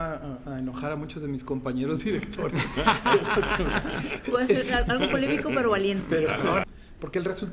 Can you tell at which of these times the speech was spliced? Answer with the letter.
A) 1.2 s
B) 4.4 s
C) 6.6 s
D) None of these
C